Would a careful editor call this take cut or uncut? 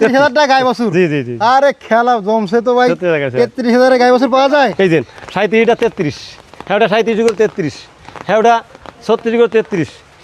cut